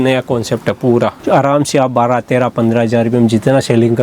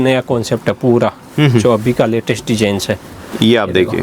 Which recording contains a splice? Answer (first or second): first